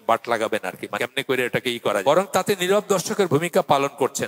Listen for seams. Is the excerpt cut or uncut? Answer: cut